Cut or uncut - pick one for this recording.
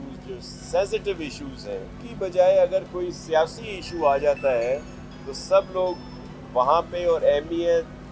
cut